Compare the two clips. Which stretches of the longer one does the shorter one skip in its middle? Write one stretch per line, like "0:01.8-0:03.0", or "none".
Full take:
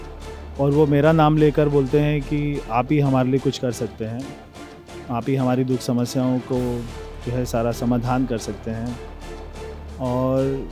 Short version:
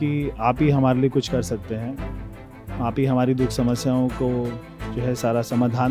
none